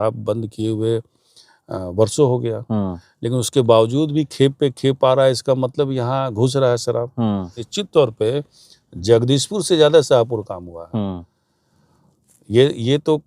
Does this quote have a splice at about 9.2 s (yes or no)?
no